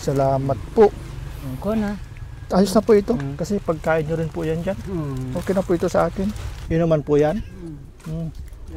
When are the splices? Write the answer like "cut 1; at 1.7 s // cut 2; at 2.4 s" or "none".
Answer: cut 1; at 6.5 s

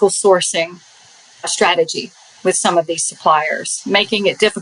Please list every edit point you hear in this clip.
cut 1; at 1.5 s

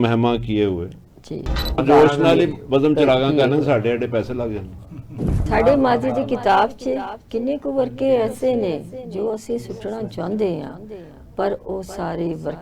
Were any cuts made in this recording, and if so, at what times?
cut 1; at 1.8 s // cut 2; at 5.4 s

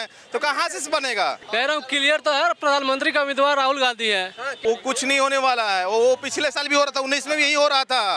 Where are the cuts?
cut 1; at 1.4 s // cut 2; at 4.4 s

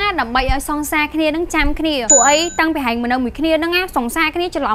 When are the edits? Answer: cut 1; at 2.0 s

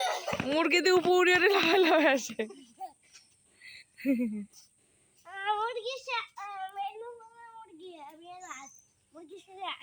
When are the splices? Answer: none

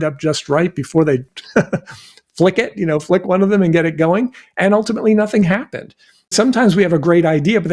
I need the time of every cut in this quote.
cut 1; at 6.3 s

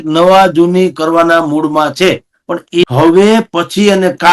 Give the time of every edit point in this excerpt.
cut 1; at 2.8 s

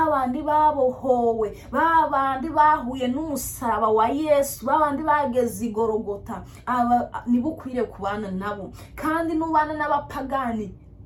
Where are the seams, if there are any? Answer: none

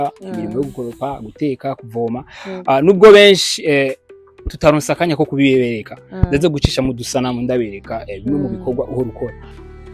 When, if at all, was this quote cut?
none

